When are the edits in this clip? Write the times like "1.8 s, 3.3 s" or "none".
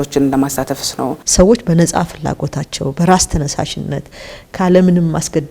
1.2 s